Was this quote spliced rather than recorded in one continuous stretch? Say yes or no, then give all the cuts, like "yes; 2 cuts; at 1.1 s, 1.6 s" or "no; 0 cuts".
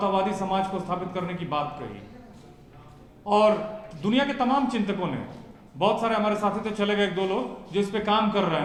no; 0 cuts